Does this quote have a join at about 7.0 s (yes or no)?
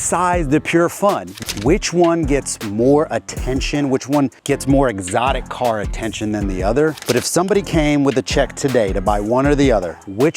yes